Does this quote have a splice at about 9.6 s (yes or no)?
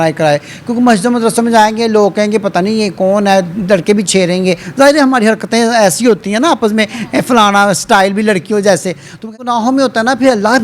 yes